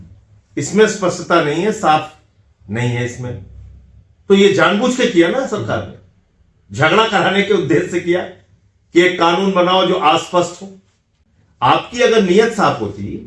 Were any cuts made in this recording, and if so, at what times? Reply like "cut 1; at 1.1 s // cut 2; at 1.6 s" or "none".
none

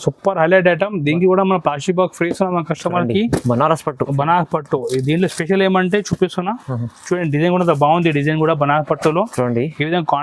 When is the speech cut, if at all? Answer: none

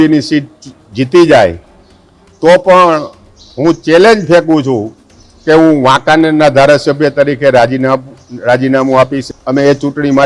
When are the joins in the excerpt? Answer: cut 1; at 9.2 s

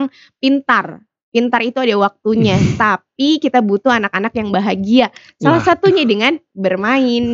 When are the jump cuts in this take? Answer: none

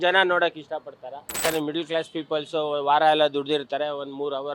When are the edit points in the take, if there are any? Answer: cut 1; at 1.4 s

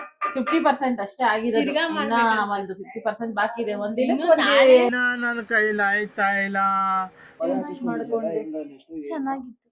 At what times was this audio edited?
cut 1; at 7.3 s

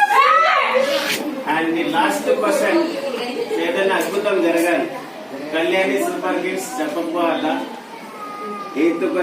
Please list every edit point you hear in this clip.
cut 1; at 1.1 s

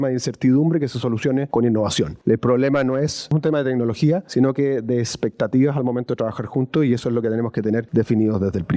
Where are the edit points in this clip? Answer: cut 1; at 1.5 s // cut 2; at 2.2 s // cut 3; at 3.3 s // cut 4; at 4.3 s // cut 5; at 7.9 s

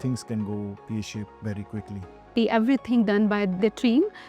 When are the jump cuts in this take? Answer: cut 1; at 2.3 s

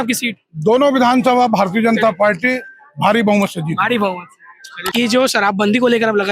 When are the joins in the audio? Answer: cut 1; at 4.8 s

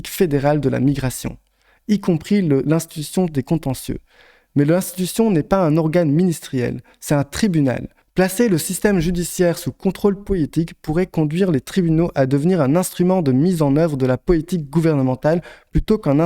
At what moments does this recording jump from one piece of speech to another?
cut 1; at 8.0 s

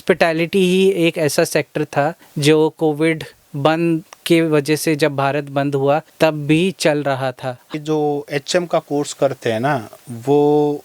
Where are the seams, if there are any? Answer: cut 1; at 7.7 s

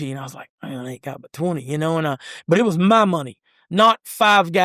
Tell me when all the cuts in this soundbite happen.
none

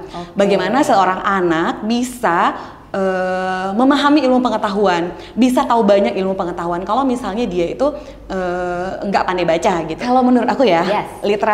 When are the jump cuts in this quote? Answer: cut 1; at 10.0 s

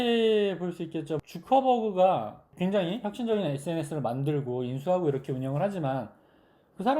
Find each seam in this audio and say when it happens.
cut 1; at 1.2 s // cut 2; at 2.4 s

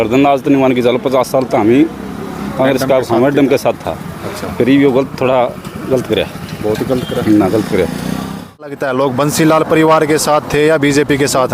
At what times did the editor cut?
cut 1; at 8.7 s

